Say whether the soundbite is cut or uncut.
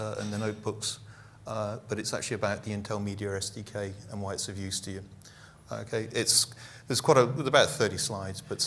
cut